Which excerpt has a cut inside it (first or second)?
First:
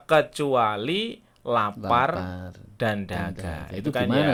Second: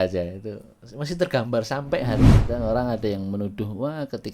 second